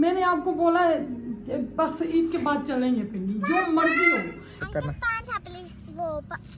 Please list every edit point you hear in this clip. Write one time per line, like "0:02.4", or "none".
0:04.6